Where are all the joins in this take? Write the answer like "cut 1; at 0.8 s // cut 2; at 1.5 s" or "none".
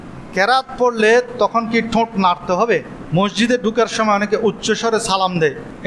cut 1; at 3.0 s